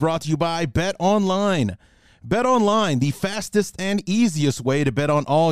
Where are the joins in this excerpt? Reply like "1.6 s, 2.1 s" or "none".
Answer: none